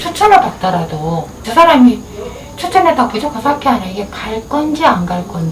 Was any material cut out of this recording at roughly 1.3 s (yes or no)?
yes